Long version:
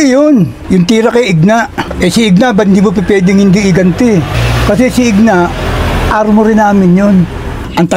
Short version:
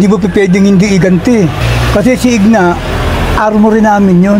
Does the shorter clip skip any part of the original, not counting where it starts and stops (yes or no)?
no